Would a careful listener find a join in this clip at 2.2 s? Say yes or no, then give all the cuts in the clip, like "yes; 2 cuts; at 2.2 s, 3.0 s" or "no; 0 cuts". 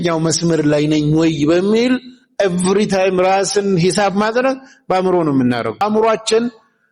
no; 1 cut; at 5.8 s